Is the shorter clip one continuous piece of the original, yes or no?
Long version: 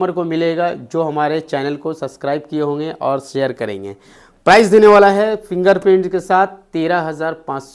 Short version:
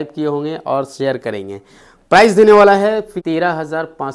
no